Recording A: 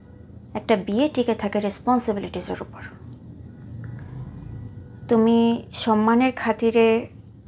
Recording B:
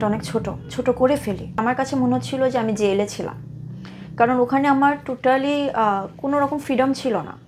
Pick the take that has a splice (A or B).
B